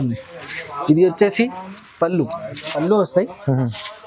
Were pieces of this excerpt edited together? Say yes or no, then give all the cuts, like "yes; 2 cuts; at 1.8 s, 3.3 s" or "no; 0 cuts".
yes; 1 cut; at 2.8 s